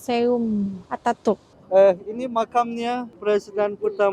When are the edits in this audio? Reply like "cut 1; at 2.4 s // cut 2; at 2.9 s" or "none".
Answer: cut 1; at 1.5 s